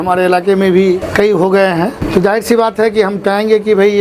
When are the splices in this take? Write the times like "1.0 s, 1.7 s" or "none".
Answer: 1.0 s, 2.0 s